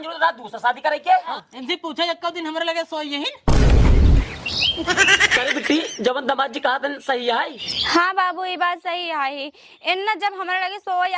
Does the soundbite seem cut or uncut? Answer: cut